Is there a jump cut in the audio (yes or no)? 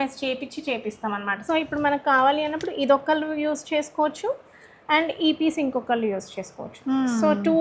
yes